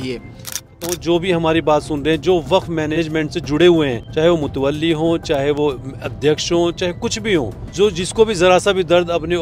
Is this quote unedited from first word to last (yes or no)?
no